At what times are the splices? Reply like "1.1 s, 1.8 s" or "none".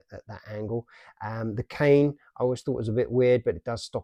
none